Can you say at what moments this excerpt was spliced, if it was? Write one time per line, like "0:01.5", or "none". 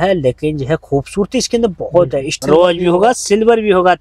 0:02.4